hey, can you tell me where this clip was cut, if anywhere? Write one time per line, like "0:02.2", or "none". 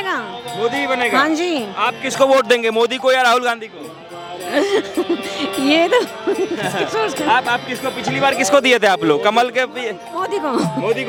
none